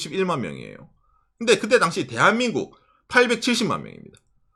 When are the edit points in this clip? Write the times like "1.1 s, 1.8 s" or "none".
none